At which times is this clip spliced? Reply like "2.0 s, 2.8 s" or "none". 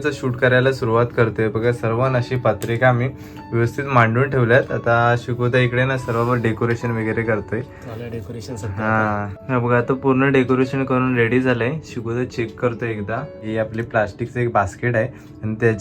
9.4 s, 13.4 s